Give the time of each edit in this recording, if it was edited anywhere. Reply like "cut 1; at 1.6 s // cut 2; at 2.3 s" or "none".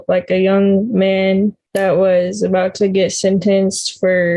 cut 1; at 1.6 s